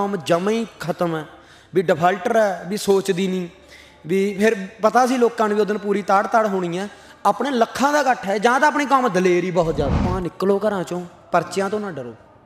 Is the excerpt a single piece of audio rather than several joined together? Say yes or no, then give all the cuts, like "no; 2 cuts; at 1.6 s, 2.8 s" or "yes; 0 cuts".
no; 1 cut; at 10.0 s